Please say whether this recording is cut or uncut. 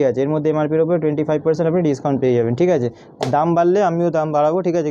uncut